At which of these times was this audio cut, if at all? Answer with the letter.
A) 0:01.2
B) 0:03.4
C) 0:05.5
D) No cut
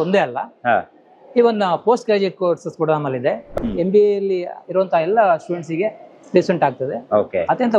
B